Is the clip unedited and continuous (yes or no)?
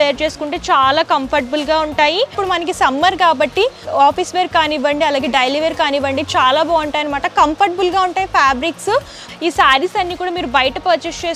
no